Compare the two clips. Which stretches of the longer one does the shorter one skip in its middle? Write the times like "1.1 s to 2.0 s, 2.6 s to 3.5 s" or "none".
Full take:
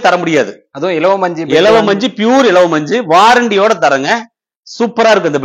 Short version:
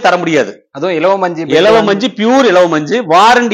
none